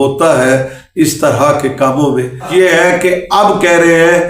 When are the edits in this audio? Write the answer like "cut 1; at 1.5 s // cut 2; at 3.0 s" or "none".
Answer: cut 1; at 2.5 s